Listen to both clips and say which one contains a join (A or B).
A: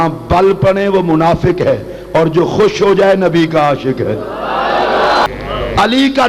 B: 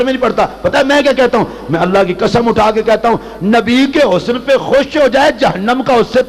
A